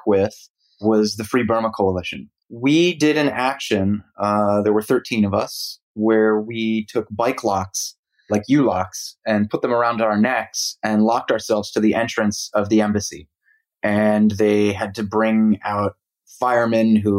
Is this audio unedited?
no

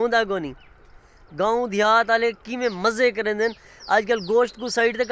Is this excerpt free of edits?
yes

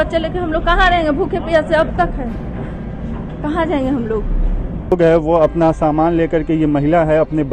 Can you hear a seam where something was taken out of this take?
yes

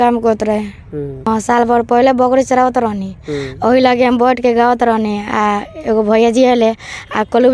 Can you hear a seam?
yes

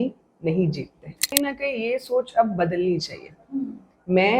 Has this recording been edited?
yes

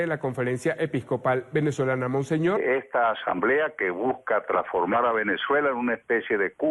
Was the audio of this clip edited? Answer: no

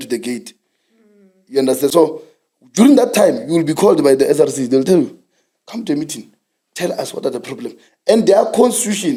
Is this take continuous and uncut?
yes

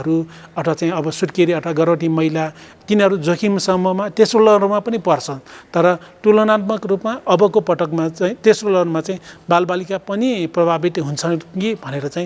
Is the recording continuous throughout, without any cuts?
yes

